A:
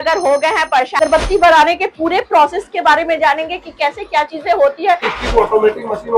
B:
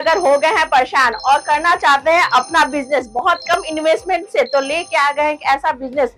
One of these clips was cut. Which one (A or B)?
A